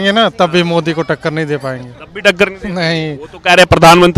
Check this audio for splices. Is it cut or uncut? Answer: uncut